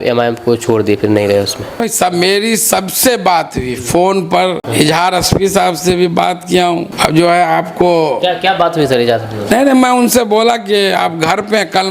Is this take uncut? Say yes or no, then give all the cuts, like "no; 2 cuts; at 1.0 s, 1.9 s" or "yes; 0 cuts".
no; 3 cuts; at 1.9 s, 4.6 s, 6.9 s